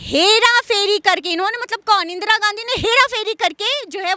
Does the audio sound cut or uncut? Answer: uncut